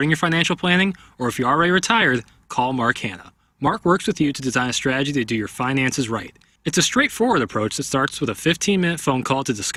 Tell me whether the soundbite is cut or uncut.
uncut